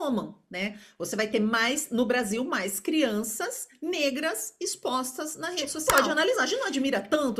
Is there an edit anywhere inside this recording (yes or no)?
yes